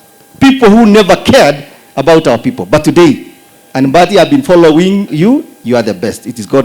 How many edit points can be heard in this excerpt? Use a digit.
1